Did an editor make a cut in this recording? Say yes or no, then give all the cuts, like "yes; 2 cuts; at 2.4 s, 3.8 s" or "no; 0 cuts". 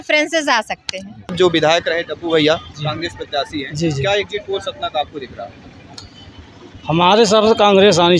yes; 1 cut; at 1.3 s